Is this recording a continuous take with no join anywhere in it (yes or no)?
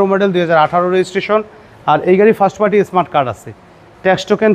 yes